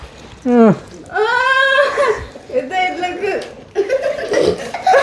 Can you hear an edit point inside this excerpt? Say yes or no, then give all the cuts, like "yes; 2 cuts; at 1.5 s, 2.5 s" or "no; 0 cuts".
no; 0 cuts